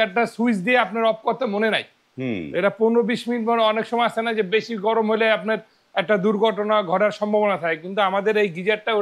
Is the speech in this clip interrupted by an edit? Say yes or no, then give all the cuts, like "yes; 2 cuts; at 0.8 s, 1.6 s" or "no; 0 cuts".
no; 0 cuts